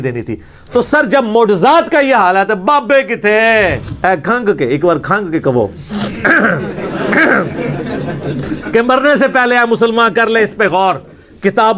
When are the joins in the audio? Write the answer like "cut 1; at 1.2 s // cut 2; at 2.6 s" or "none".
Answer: cut 1; at 3.9 s